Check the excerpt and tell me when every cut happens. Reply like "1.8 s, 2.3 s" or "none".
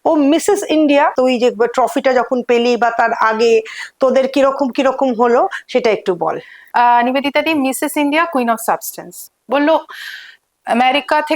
1.1 s, 9.2 s